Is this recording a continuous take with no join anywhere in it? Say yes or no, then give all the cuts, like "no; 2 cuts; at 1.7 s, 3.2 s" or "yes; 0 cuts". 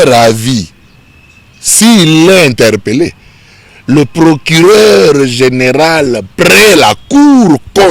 yes; 0 cuts